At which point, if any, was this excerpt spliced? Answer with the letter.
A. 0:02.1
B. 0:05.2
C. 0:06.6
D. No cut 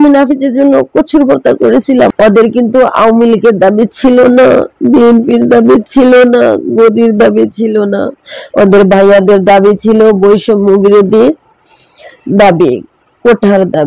A